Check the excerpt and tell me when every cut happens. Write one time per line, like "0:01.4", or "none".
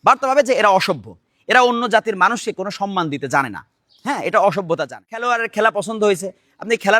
0:05.3